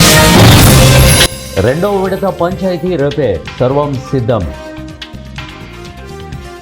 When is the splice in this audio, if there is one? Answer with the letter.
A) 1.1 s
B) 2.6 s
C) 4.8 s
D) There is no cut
A